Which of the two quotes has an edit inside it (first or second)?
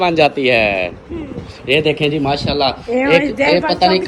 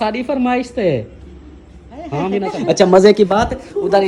second